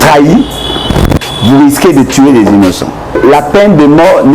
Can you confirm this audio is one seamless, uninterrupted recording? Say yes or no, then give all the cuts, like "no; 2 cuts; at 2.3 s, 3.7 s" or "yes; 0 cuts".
no; 1 cut; at 3.2 s